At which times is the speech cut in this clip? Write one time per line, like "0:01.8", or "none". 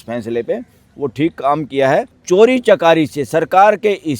0:02.2